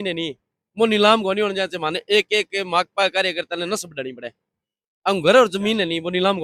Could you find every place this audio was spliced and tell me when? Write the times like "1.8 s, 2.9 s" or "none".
none